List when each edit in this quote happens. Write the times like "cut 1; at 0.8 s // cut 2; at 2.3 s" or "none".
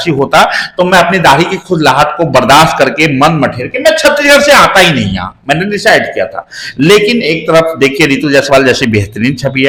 none